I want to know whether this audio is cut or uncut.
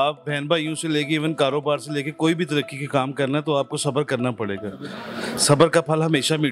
uncut